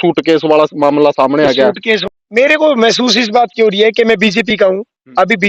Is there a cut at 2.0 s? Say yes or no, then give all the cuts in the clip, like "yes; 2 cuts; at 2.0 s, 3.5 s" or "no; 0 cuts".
yes; 1 cut; at 2.0 s